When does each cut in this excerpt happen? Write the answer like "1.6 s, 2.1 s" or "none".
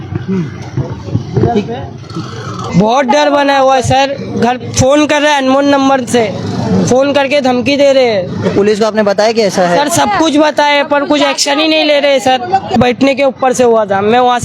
2.6 s, 12.8 s